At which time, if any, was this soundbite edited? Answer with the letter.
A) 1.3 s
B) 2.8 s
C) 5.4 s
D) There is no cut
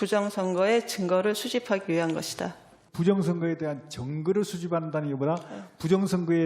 B